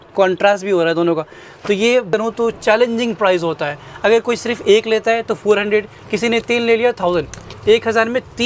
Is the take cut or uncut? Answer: cut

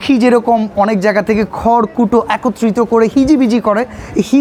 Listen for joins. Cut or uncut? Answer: uncut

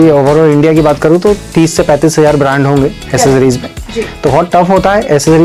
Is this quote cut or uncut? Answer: uncut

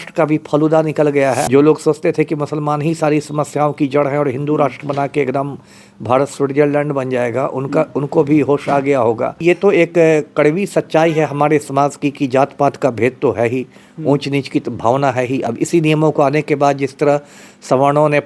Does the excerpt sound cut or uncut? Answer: cut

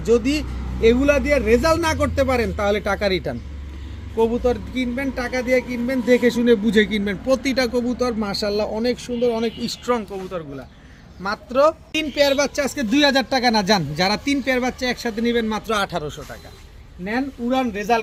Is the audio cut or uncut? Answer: uncut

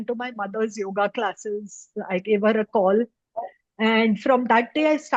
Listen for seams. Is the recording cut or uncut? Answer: uncut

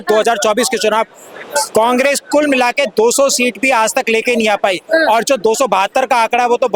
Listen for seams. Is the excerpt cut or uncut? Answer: uncut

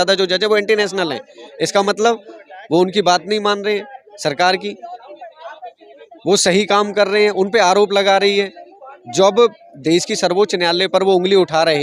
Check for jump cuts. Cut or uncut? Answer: uncut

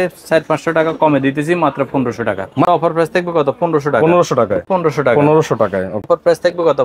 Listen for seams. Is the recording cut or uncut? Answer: cut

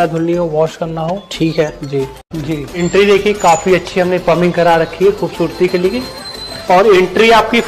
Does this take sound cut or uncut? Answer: cut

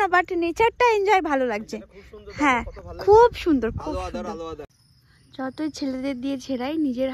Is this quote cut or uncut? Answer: cut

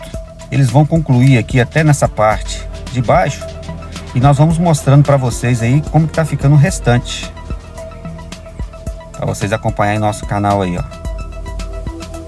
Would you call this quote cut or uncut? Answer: uncut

